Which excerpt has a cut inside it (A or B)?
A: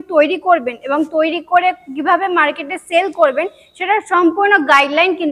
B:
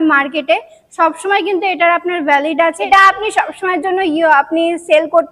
B